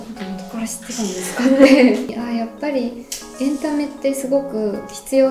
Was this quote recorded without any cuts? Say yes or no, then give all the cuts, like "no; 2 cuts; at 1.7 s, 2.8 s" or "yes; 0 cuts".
no; 1 cut; at 2.2 s